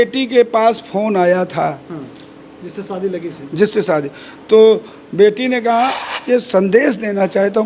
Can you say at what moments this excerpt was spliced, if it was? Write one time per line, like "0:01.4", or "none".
0:06.0